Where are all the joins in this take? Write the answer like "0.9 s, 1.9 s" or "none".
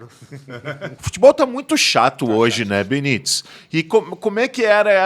0.9 s